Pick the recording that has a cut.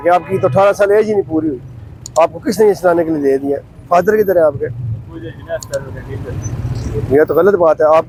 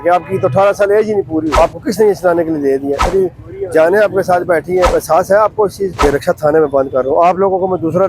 second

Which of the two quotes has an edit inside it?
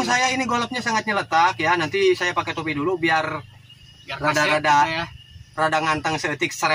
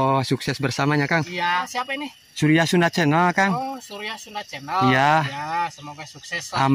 second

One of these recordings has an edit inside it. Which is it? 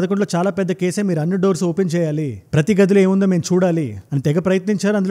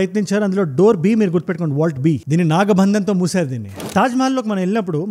second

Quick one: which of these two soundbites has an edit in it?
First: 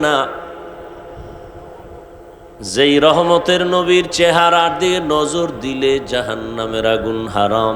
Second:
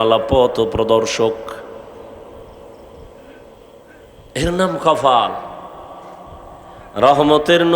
second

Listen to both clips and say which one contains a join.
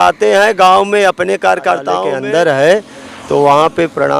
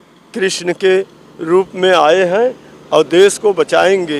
first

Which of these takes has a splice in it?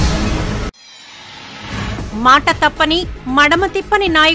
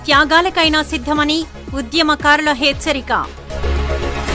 first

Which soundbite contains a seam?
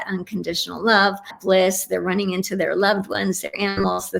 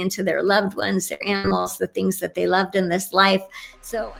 first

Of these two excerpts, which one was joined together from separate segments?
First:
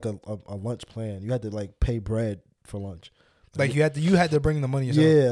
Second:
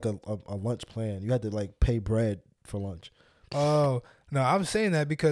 second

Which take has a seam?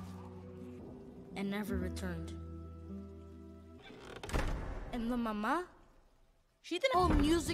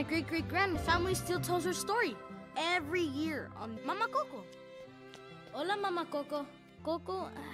second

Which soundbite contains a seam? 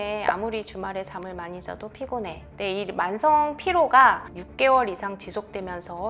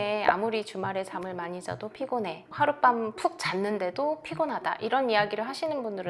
first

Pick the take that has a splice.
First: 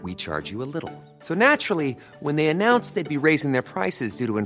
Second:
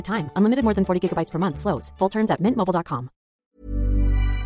second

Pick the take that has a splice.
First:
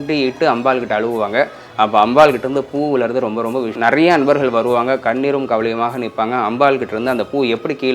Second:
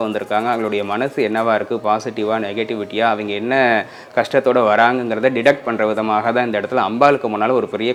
first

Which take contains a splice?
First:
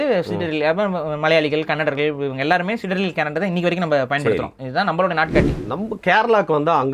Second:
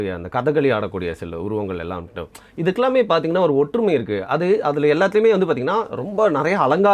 first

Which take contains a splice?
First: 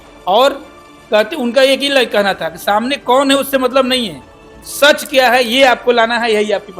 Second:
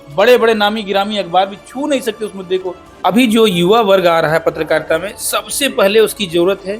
second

